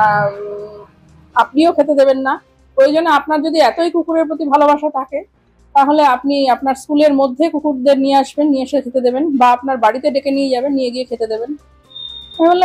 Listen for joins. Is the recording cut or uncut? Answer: uncut